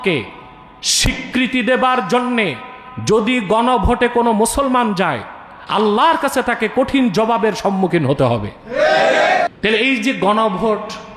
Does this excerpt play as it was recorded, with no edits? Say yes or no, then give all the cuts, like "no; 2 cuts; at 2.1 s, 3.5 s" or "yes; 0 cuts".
no; 1 cut; at 9.5 s